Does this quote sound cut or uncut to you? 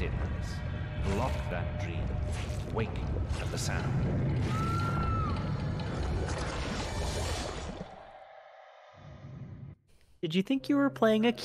cut